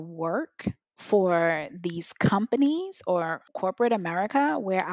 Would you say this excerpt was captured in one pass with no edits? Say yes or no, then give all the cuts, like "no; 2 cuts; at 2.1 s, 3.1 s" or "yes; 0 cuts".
no; 1 cut; at 3.4 s